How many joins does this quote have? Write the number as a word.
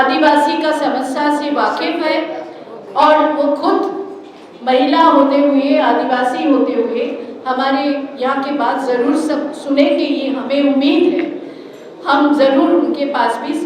zero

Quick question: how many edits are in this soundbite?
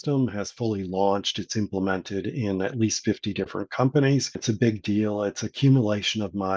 one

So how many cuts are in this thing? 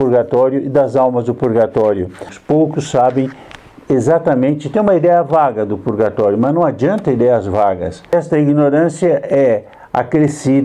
two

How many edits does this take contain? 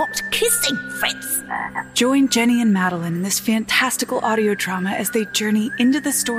one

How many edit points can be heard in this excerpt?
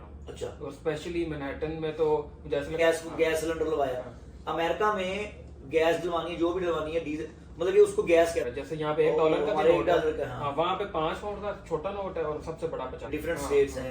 three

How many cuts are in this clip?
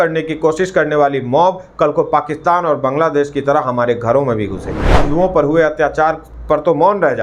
one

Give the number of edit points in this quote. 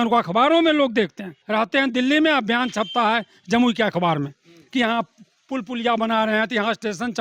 one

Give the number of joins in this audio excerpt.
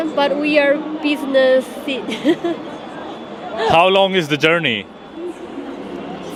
zero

